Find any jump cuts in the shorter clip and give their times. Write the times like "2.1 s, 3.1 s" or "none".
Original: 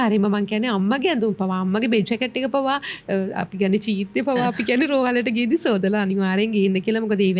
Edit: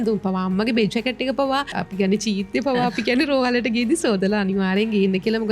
1.8 s